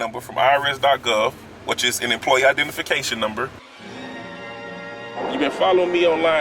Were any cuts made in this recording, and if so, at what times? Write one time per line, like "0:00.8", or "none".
0:03.7